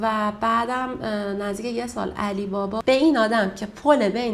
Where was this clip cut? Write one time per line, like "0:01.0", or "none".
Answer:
0:02.8